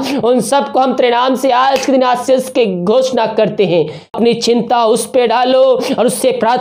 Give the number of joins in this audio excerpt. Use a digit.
1